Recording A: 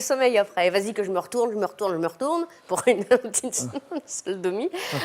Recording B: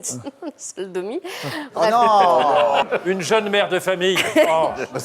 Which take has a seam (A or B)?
B